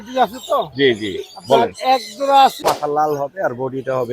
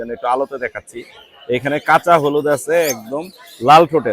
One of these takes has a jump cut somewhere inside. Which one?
first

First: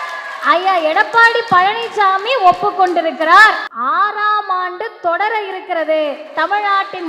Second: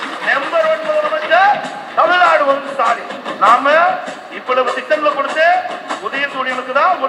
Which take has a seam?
first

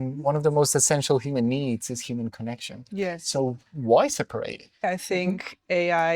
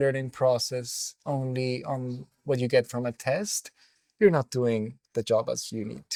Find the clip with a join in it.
first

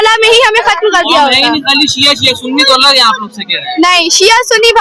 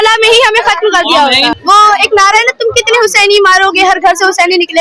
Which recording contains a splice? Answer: second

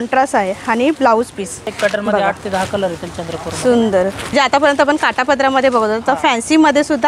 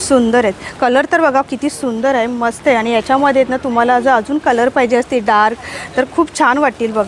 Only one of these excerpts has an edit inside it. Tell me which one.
first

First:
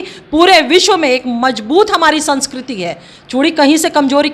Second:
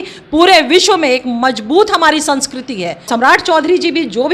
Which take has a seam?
second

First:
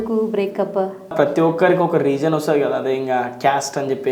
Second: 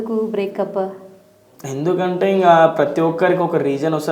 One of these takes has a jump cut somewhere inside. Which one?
first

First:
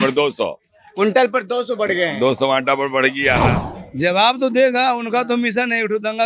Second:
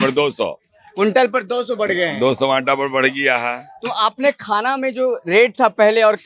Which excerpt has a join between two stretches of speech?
first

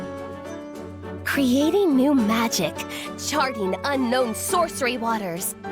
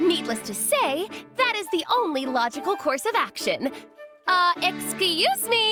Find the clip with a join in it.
first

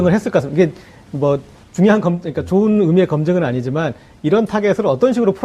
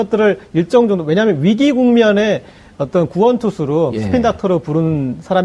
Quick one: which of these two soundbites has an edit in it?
first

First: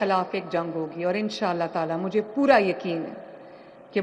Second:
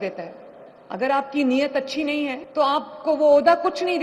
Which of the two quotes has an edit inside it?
second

